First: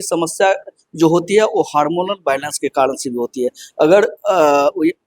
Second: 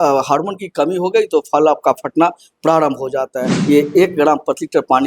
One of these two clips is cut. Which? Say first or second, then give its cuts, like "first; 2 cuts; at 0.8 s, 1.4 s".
second; 1 cut; at 3.5 s